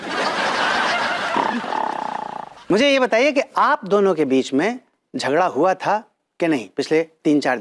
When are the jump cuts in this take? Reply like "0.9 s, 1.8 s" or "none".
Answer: 2.5 s

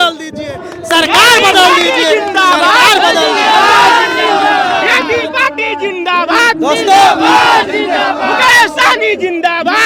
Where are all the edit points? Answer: none

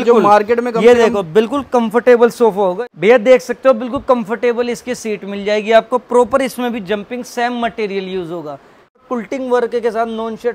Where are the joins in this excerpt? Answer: 2.8 s, 9.0 s

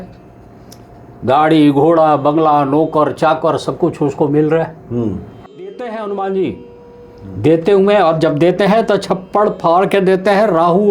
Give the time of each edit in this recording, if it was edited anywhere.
5.5 s

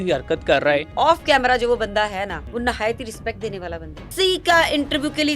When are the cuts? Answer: 0.9 s, 2.4 s, 4.1 s

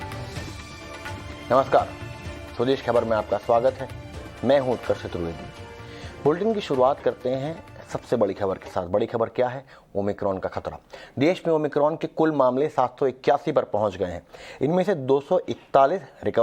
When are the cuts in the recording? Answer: none

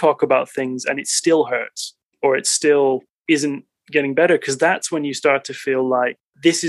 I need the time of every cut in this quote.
none

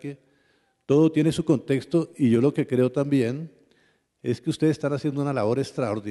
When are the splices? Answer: 5.2 s

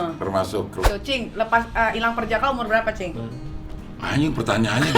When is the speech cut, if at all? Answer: 0.9 s

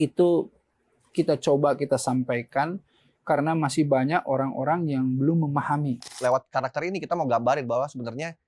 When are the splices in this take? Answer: 6.1 s

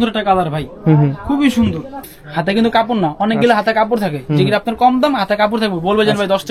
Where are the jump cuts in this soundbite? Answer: 2.2 s

